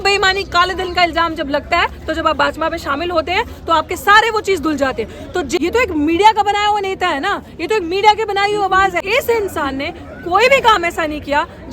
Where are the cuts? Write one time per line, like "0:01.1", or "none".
0:05.6
0:09.0